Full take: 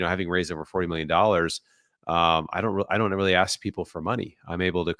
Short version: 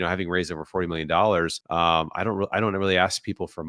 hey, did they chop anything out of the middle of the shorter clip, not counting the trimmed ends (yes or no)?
yes